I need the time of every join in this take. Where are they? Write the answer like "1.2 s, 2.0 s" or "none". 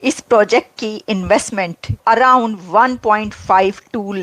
2.0 s